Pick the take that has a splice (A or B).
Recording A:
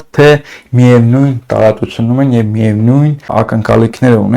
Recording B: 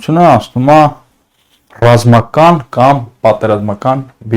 A